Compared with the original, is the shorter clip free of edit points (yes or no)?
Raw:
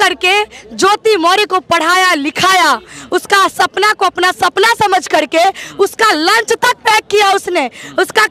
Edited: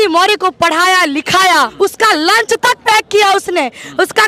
no